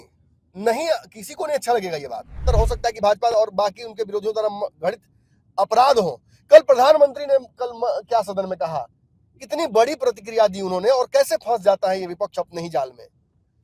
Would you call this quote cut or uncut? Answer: cut